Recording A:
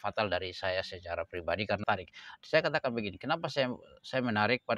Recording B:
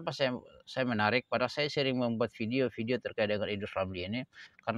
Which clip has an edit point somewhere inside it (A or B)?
A